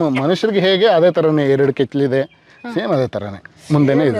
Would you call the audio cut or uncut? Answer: uncut